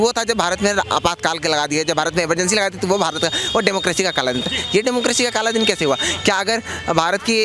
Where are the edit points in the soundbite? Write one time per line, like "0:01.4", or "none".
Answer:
none